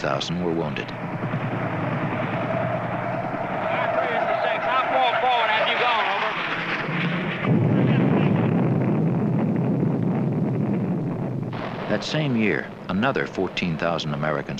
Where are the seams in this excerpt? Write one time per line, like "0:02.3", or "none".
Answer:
0:08.5